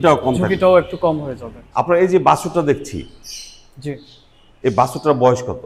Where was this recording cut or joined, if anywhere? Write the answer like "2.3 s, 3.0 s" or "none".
none